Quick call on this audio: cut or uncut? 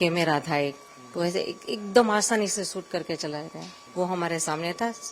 cut